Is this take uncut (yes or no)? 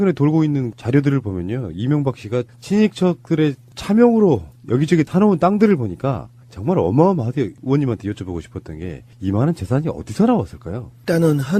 no